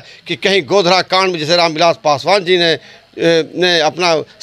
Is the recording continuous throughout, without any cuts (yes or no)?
yes